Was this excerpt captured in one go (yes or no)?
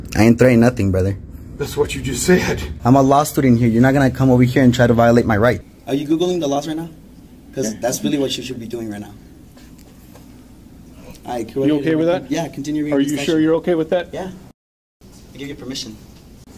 no